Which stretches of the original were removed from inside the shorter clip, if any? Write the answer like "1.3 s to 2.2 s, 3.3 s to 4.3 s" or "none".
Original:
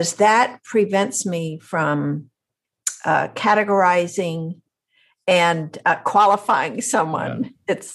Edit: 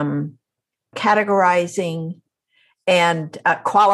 2.9 s to 3.3 s